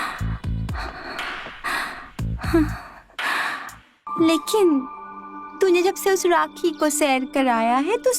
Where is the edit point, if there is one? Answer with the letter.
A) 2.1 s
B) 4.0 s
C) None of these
B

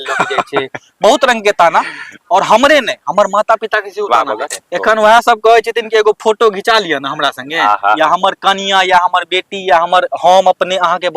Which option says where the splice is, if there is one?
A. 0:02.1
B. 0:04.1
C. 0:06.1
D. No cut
B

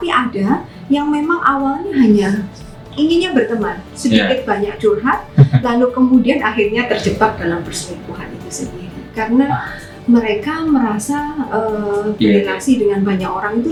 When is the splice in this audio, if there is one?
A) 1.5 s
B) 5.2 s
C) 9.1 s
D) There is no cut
D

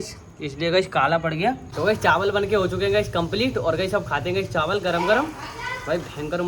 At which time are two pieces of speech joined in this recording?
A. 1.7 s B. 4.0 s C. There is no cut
A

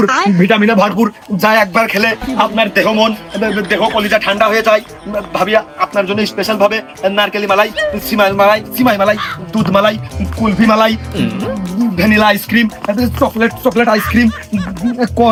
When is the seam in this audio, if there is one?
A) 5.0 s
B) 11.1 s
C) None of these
C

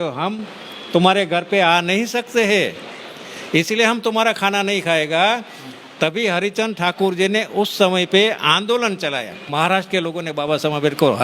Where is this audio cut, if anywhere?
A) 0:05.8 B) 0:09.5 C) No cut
B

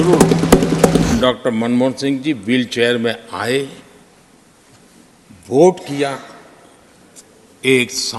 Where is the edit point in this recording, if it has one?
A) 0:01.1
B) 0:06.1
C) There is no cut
A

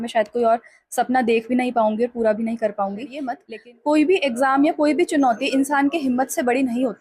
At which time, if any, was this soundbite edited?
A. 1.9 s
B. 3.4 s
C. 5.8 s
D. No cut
B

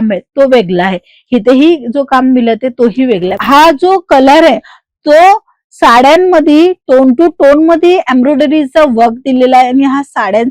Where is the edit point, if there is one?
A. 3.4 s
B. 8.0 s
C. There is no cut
A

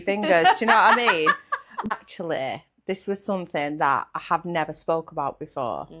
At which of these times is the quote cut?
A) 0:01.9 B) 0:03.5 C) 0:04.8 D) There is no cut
A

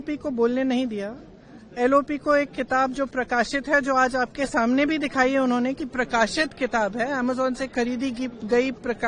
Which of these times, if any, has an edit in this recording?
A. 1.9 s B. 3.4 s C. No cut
C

